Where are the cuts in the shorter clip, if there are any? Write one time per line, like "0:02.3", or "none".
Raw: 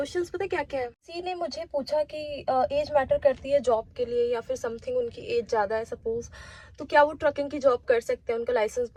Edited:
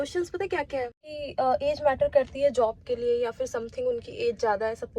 0:01.1